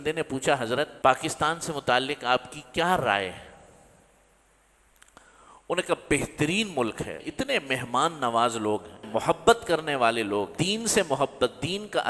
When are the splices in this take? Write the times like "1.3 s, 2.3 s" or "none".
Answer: 0.9 s, 7.1 s, 9.0 s, 10.6 s